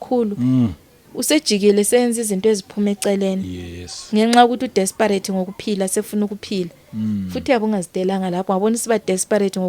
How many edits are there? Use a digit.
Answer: 0